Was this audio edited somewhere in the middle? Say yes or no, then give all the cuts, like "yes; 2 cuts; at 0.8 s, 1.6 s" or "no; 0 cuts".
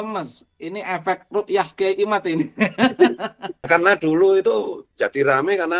yes; 1 cut; at 3.7 s